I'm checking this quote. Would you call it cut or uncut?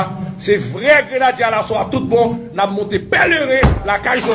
uncut